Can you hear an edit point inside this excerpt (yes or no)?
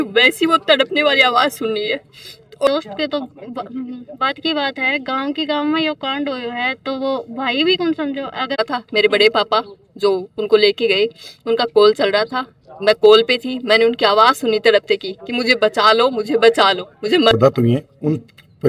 yes